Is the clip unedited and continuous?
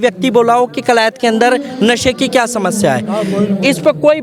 yes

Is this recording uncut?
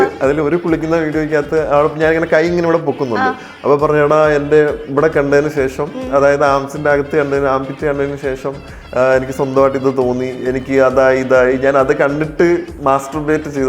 no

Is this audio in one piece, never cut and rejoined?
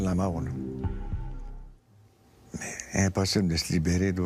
yes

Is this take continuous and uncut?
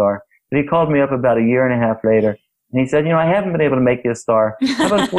yes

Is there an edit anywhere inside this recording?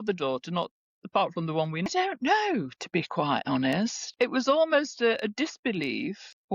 yes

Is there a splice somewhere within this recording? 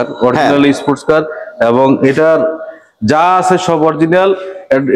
no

